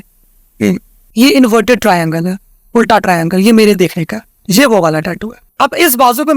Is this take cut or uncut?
cut